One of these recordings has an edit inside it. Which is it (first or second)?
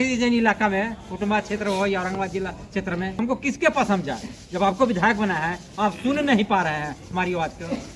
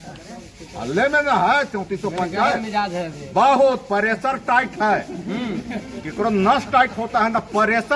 first